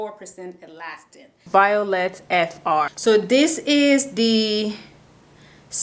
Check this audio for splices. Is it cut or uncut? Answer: cut